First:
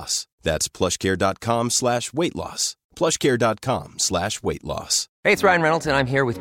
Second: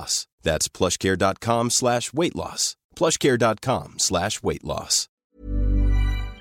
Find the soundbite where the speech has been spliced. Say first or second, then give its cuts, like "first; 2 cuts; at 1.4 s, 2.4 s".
second; 1 cut; at 5.1 s